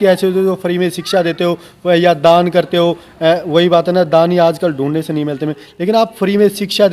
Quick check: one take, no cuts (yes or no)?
yes